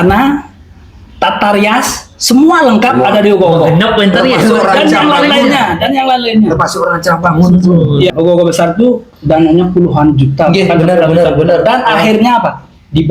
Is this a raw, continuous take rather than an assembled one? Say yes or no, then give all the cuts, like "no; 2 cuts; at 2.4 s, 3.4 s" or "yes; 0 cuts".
no; 1 cut; at 8.1 s